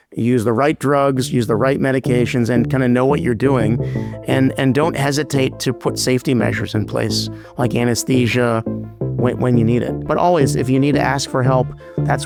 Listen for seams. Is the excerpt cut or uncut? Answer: uncut